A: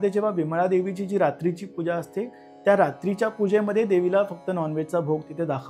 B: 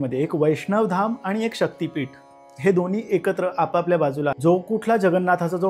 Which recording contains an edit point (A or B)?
B